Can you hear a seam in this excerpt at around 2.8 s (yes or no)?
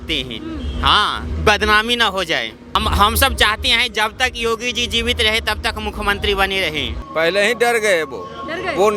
yes